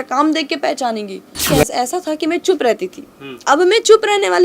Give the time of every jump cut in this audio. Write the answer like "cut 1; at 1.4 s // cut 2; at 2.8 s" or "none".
cut 1; at 1.4 s